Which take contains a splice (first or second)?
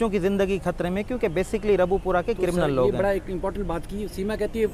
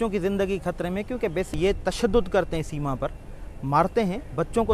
second